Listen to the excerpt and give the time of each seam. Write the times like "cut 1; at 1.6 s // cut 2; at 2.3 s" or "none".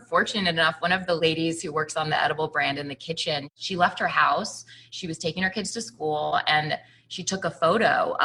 cut 1; at 1.2 s